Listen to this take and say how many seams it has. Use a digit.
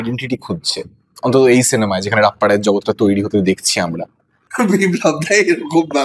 1